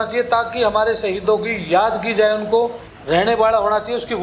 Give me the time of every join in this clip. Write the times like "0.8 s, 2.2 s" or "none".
2.9 s